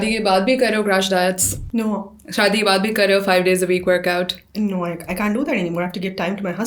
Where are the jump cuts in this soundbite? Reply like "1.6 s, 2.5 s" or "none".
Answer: 1.5 s